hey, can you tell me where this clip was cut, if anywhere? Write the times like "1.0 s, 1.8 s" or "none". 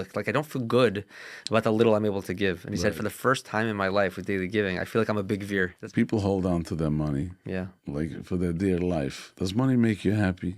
5.8 s, 7.8 s, 9.2 s